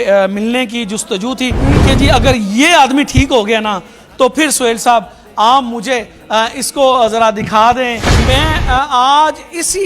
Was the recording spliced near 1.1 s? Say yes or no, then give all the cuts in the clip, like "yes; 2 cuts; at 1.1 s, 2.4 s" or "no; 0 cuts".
no; 1 cut; at 8.0 s